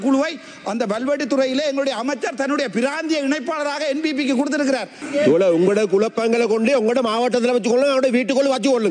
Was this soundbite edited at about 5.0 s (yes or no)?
yes